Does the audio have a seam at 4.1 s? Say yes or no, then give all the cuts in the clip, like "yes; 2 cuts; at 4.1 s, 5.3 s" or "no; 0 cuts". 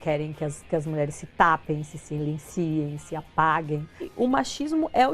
yes; 1 cut; at 4.1 s